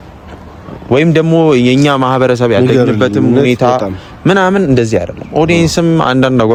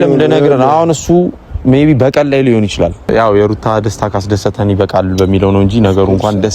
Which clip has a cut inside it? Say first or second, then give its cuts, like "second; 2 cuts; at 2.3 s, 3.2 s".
second; 1 cut; at 3.1 s